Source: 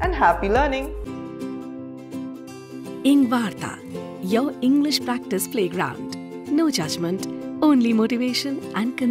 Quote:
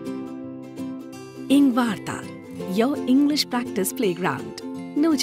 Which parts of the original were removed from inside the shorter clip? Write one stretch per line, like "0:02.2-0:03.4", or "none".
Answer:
0:02.8-0:03.0